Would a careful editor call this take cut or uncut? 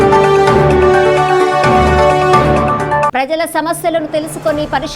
cut